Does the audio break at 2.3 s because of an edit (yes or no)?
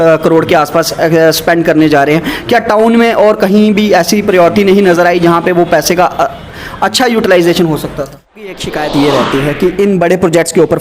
no